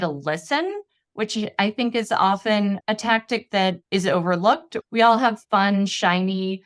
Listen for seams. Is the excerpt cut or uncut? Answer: cut